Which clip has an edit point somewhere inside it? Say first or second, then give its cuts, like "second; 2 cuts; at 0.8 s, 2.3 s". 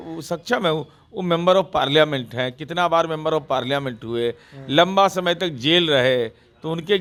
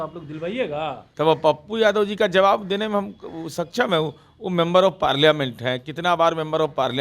second; 1 cut; at 1.0 s